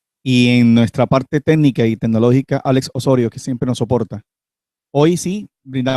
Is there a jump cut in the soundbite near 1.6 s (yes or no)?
yes